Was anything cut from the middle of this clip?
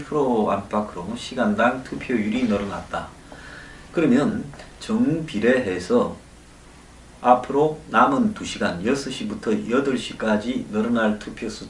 yes; 1 cut; at 7.9 s

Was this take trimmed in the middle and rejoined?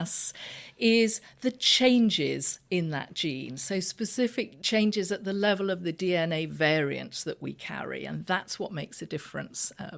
yes; 1 cut; at 4.6 s

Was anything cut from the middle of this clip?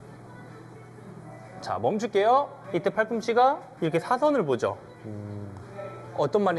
yes; 2 cuts; at 2.6 s, 3.7 s

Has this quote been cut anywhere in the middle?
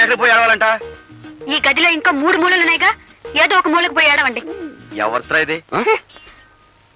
yes; 1 cut; at 5.6 s

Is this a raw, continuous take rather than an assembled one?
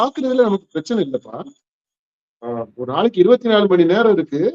yes; 0 cuts

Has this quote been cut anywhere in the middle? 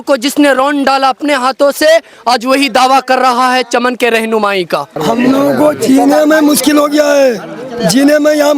yes; 1 cut; at 4.9 s

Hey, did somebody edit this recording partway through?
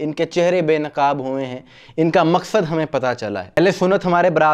yes; 1 cut; at 3.6 s

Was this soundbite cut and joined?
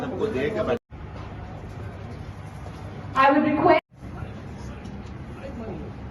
yes; 2 cuts; at 0.9 s, 3.9 s

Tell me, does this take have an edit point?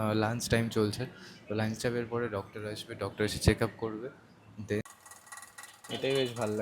yes; 1 cut; at 4.8 s

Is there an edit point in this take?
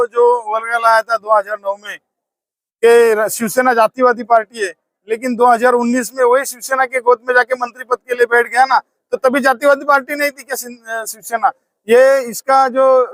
no; 0 cuts

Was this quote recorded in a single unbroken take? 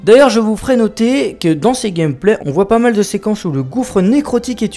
no; 1 cut; at 1.0 s

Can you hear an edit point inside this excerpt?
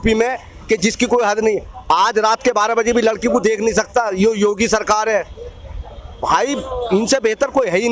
no; 0 cuts

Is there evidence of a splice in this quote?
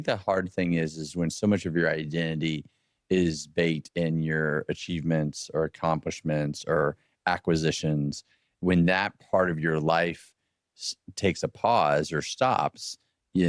no; 0 cuts

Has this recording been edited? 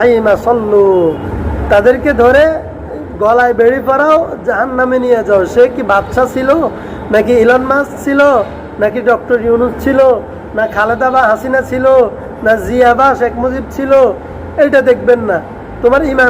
yes; 1 cut; at 1.3 s

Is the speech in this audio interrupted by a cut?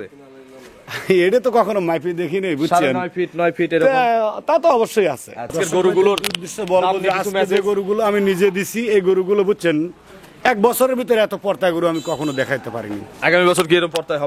yes; 1 cut; at 5.5 s

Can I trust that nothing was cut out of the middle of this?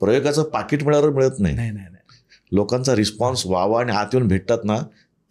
yes; 0 cuts

